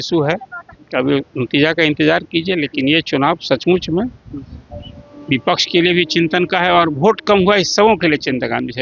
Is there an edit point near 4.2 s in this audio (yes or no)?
no